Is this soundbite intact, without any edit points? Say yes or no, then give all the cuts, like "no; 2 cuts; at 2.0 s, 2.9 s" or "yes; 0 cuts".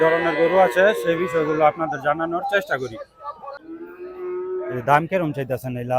no; 1 cut; at 3.6 s